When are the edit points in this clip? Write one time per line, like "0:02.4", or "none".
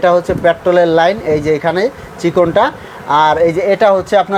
none